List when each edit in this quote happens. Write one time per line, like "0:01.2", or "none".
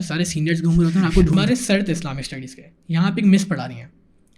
0:01.3